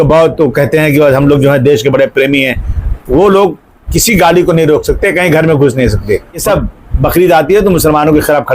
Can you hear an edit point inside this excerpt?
yes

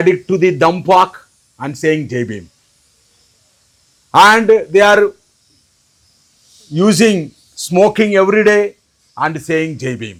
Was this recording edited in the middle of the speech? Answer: no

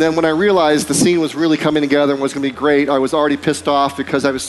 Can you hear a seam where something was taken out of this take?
no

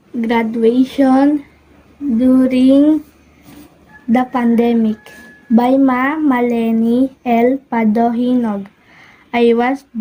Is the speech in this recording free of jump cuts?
yes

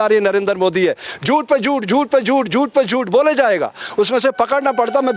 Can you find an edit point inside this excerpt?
no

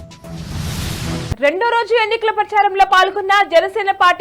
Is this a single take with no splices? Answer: no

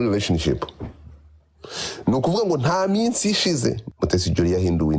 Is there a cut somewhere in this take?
yes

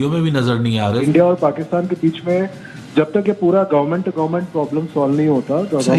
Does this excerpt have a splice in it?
yes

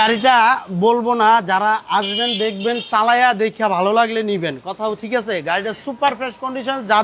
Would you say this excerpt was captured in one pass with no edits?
yes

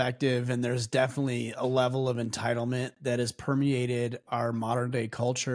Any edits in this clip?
no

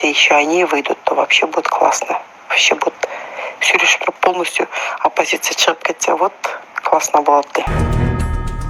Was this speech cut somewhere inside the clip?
yes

